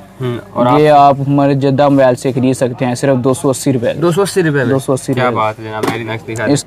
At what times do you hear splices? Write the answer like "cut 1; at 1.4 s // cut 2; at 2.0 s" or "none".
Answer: none